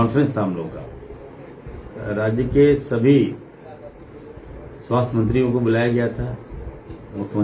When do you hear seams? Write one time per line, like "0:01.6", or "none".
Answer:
none